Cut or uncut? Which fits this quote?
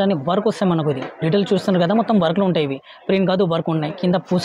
uncut